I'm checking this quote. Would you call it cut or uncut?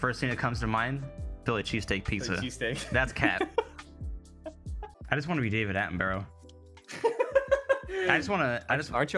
cut